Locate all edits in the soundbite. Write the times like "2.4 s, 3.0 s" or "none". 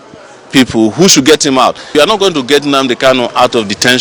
1.9 s